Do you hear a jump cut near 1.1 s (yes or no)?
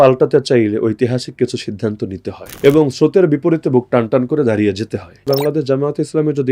no